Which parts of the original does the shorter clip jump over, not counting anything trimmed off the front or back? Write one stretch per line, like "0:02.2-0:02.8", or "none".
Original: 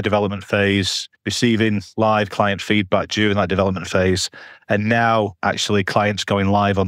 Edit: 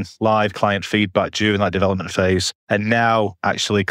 0:04.3-0:04.5